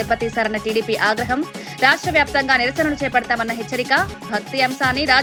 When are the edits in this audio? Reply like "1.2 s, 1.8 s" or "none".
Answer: none